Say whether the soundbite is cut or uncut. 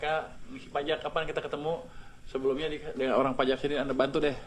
uncut